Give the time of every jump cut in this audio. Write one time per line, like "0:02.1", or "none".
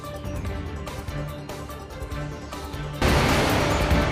0:01.9
0:03.0